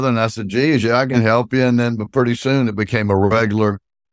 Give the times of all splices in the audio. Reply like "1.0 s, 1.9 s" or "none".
none